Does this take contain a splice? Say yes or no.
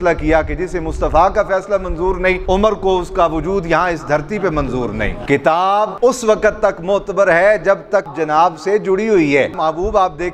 yes